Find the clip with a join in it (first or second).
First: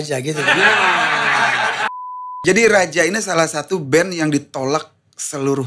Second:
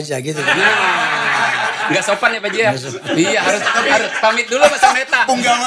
first